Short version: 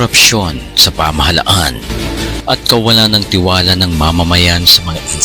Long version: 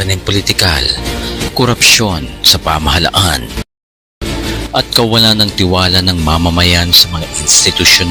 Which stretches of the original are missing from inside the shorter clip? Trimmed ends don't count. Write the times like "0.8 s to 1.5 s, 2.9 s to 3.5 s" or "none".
3.5 s to 4.1 s